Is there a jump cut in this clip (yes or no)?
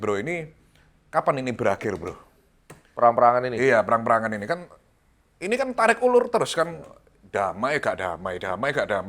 no